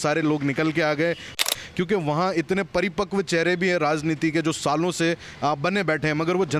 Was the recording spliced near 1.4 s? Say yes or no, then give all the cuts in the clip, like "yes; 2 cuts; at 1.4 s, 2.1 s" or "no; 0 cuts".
yes; 1 cut; at 1.4 s